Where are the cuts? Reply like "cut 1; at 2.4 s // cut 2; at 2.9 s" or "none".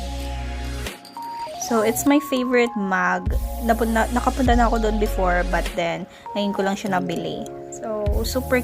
cut 1; at 1.4 s